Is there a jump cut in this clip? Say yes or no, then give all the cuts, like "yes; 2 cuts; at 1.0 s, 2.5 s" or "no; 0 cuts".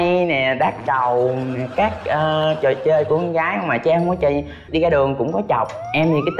yes; 1 cut; at 4.6 s